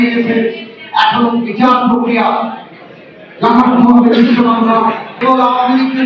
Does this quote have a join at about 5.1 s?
yes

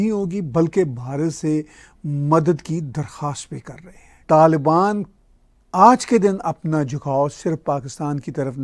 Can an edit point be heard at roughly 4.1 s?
no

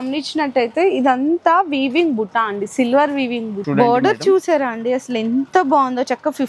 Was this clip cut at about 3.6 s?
yes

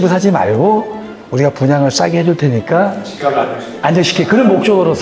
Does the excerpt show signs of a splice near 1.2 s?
no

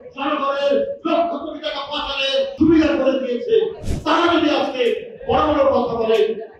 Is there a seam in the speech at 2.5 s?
yes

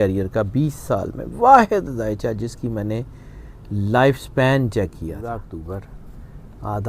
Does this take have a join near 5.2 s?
yes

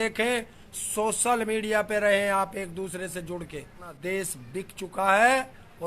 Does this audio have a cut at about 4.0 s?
yes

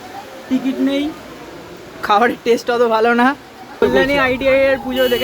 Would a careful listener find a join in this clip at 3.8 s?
yes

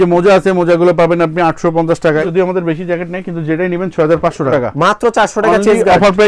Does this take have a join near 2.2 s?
yes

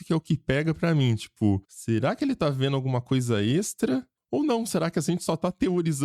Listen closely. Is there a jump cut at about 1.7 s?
yes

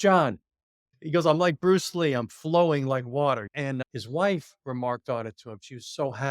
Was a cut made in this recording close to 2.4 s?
no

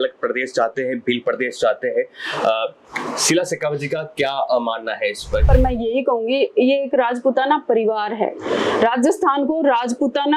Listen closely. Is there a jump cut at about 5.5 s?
yes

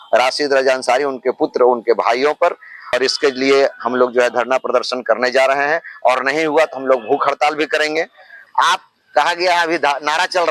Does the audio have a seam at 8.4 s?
yes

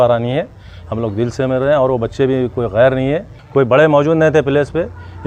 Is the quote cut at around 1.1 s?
no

